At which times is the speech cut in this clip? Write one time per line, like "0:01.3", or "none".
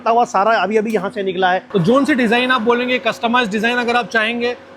0:01.7